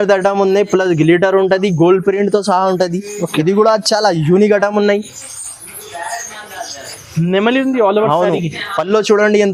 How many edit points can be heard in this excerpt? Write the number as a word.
zero